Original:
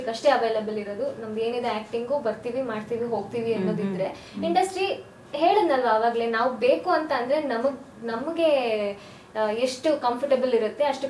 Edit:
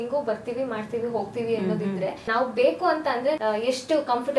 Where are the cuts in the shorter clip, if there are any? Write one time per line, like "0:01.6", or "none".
0:02.3
0:03.4